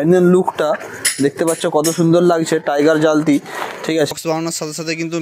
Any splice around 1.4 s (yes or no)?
no